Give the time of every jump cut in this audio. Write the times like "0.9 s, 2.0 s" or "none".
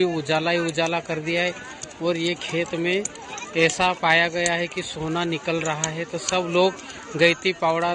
none